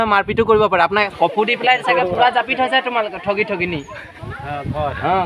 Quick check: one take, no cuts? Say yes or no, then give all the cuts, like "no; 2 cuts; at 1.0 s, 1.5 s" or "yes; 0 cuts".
no; 1 cut; at 1.1 s